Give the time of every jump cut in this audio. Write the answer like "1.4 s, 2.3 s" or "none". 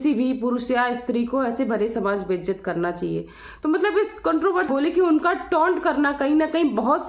4.7 s